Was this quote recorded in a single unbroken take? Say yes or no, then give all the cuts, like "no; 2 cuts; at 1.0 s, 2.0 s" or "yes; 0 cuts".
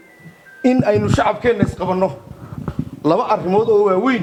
yes; 0 cuts